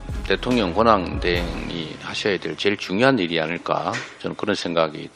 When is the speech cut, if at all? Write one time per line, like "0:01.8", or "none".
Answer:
none